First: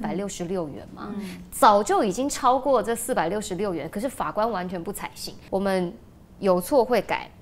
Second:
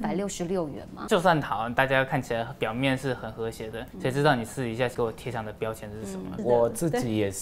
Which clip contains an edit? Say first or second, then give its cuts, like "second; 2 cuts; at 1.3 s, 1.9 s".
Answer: second; 4 cuts; at 1.0 s, 3.8 s, 4.9 s, 6.3 s